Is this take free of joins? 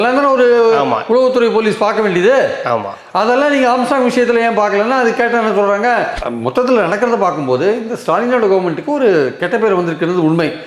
no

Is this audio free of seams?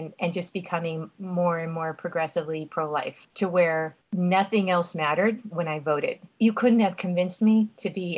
no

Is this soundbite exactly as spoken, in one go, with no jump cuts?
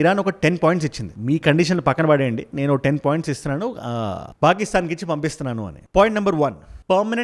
yes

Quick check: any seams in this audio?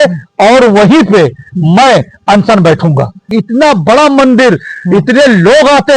yes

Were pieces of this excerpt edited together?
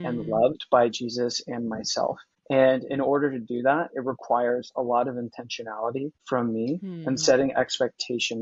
yes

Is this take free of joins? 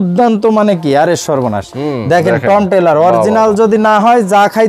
no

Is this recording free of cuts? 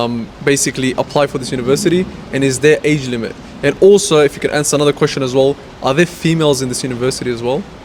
yes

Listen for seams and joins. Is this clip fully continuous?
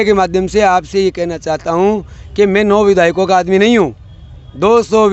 yes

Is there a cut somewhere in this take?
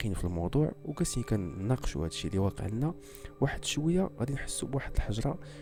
no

